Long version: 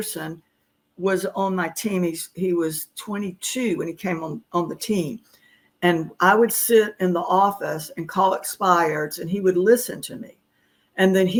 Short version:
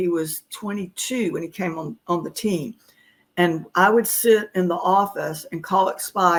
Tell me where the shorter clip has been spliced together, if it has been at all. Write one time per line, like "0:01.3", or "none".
none